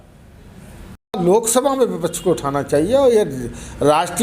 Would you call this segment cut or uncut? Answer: cut